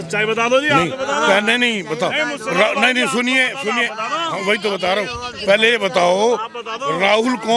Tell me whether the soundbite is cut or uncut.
uncut